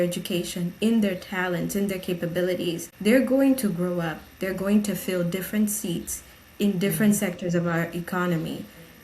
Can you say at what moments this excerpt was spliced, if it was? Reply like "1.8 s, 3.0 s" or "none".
2.9 s